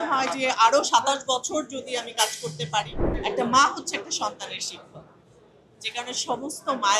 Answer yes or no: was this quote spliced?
yes